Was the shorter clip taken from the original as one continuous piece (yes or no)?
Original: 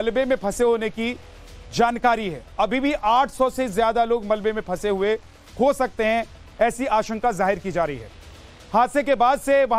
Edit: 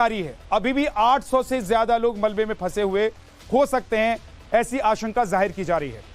yes